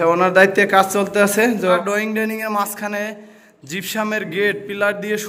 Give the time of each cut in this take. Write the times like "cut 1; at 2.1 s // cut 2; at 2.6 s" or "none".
cut 1; at 1.8 s

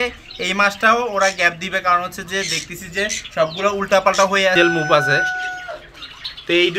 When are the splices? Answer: cut 1; at 4.5 s

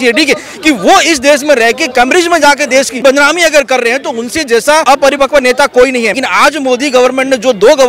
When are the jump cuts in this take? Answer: cut 1; at 3.0 s // cut 2; at 4.8 s // cut 3; at 6.2 s

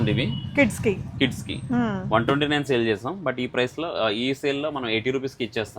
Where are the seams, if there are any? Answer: none

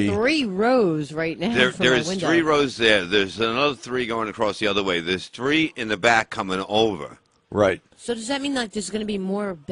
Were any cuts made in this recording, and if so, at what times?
cut 1; at 5.8 s

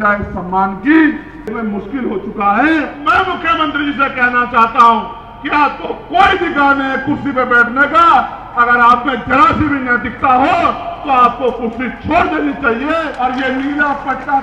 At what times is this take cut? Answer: cut 1; at 1.5 s // cut 2; at 3.0 s // cut 3; at 13.1 s

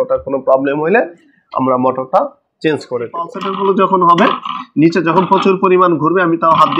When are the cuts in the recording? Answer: cut 1; at 3.4 s

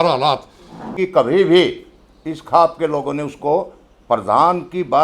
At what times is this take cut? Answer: cut 1; at 0.9 s

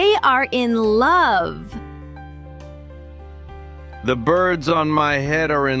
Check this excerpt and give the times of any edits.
cut 1; at 1.8 s // cut 2; at 4.0 s

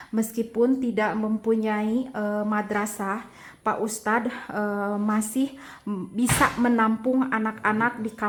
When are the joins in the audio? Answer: none

